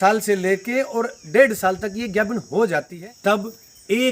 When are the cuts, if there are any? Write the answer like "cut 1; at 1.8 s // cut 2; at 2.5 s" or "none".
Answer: cut 1; at 2.9 s